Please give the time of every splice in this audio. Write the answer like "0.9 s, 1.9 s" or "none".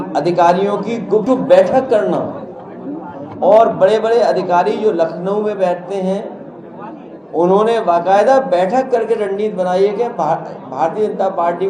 1.2 s